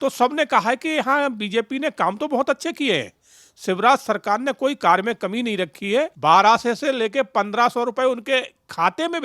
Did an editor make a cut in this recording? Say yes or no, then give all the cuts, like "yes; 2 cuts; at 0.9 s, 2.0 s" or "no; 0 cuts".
yes; 1 cut; at 6.1 s